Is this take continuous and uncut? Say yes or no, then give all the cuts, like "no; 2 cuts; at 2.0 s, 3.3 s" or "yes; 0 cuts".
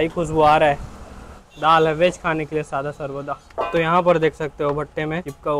yes; 0 cuts